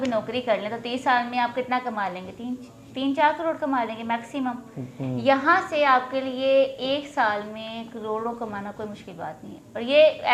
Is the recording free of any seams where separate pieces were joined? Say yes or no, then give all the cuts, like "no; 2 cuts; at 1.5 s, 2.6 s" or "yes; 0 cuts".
yes; 0 cuts